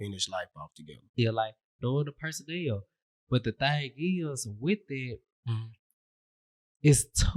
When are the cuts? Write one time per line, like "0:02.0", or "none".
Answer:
0:01.1